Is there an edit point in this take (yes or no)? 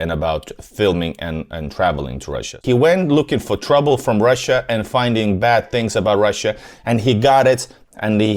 yes